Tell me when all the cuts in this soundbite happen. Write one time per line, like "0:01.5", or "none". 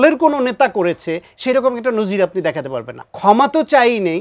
0:03.0